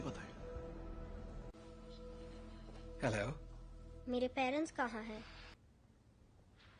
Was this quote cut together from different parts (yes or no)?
yes